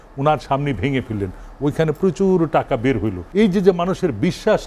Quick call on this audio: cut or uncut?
cut